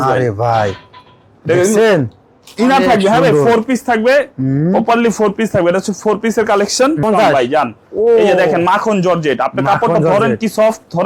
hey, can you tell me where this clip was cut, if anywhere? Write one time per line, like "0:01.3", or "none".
0:07.0